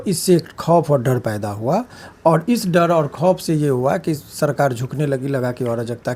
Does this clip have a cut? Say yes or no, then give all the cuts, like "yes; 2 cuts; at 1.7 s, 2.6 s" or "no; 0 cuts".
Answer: no; 0 cuts